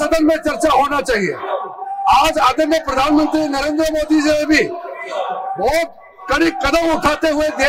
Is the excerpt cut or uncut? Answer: uncut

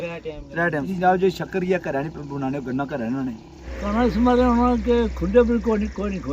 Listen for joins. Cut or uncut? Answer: cut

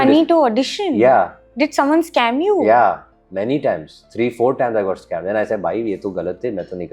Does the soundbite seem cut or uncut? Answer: uncut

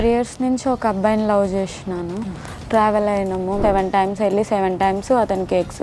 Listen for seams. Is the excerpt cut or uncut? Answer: cut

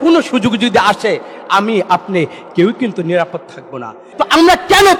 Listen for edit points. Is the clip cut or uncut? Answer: cut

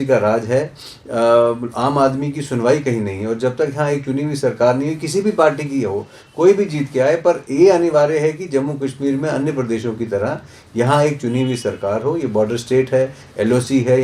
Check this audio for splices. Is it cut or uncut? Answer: uncut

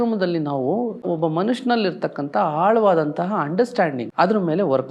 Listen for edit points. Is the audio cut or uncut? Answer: cut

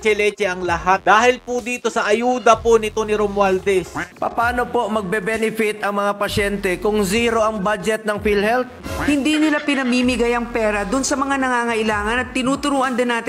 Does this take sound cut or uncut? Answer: cut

